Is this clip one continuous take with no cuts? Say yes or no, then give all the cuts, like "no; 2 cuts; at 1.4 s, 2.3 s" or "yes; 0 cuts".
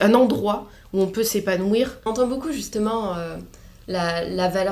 no; 1 cut; at 2.1 s